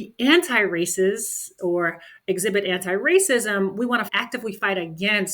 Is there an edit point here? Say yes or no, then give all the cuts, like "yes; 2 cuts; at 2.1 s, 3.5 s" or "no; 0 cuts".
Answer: yes; 2 cuts; at 1.5 s, 4.1 s